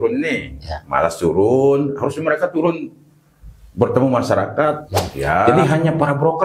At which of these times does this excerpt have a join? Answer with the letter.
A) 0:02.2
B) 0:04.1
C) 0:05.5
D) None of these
C